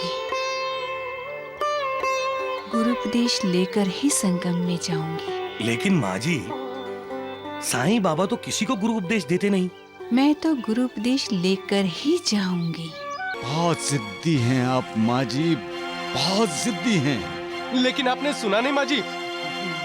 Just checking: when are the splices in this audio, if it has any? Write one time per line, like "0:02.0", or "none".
0:13.3